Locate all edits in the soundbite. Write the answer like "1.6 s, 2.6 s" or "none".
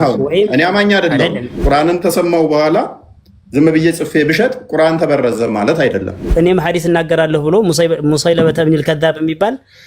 1.5 s, 6.2 s

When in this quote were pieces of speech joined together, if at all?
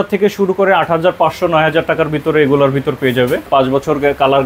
3.5 s

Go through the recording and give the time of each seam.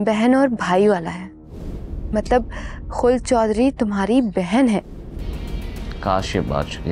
none

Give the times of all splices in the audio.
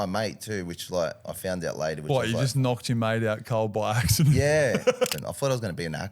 5.1 s

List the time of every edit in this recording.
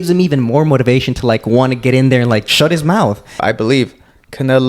2.5 s, 3.4 s

